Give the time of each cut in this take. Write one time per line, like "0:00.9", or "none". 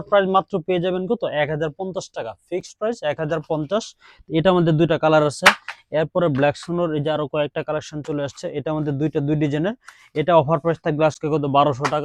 none